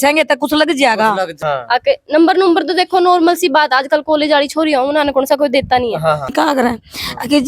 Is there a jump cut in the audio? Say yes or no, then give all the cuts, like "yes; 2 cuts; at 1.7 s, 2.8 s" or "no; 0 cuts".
yes; 2 cuts; at 1.4 s, 6.3 s